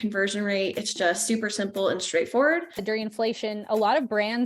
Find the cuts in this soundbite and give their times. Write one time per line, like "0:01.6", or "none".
0:02.8